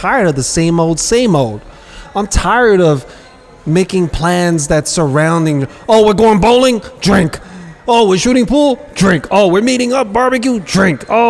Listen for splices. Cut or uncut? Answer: uncut